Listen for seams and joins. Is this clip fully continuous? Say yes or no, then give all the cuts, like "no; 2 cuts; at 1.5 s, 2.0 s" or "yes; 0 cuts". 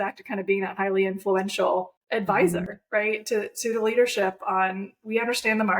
no; 1 cut; at 2.0 s